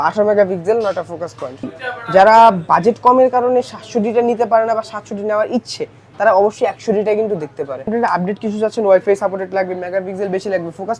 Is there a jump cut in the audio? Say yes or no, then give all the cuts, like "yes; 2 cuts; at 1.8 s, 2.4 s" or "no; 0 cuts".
yes; 2 cuts; at 1.7 s, 7.9 s